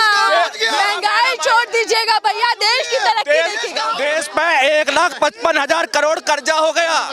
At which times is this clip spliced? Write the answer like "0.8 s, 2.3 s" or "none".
3.9 s